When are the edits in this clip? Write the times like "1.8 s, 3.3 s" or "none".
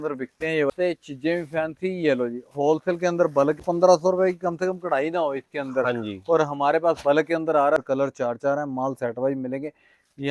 0.7 s, 3.6 s, 7.8 s